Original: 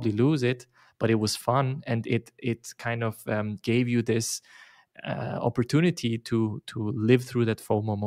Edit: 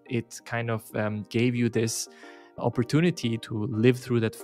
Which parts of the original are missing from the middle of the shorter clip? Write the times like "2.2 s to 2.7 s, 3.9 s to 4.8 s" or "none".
4.8 s to 5.3 s, 6.2 s to 6.7 s

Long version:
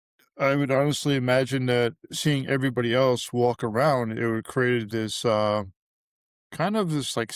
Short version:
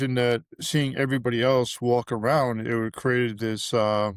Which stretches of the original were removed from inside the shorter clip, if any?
none

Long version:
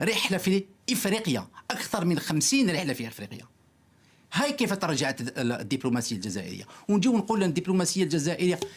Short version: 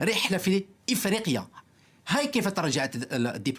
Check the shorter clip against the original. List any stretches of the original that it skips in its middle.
1.5 s to 3.8 s

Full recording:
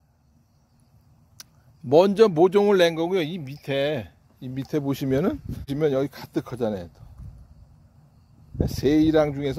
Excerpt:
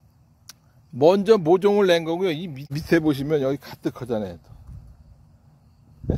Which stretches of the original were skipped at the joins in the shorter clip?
3.7 s to 5.3 s

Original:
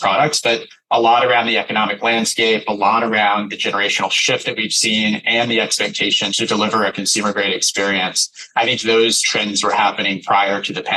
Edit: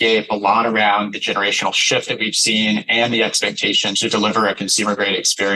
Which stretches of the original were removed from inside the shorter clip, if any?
none

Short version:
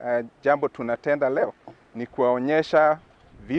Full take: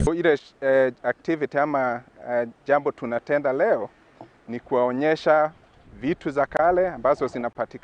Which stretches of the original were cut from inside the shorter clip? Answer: 3.6 s to 3.9 s

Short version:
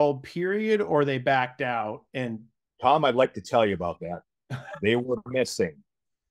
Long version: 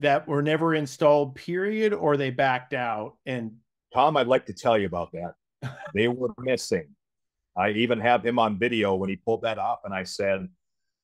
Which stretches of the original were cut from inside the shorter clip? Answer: none

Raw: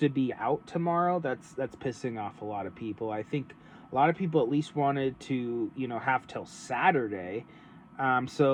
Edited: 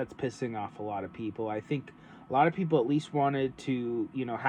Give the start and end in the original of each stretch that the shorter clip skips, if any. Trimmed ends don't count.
none

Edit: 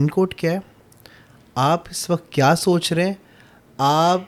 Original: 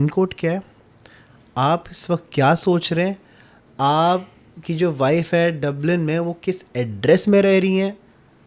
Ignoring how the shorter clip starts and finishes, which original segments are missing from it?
none

